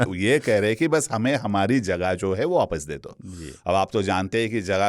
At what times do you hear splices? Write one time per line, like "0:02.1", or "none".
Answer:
none